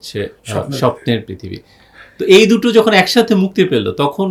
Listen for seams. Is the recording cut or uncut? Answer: uncut